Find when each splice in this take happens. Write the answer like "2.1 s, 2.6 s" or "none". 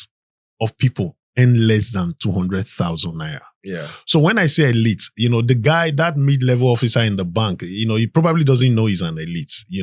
none